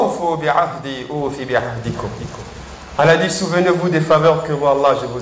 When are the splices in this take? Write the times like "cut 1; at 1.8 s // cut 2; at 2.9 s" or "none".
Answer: none